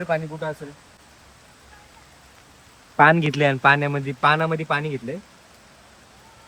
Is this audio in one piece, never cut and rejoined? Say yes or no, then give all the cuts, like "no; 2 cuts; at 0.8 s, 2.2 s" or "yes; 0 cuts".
no; 1 cut; at 1.0 s